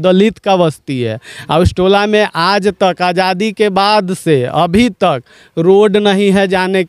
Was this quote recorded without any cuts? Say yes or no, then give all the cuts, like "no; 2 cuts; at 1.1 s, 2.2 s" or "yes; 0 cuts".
yes; 0 cuts